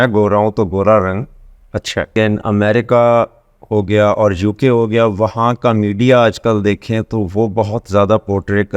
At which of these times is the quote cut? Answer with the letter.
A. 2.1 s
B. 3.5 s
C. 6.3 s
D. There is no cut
A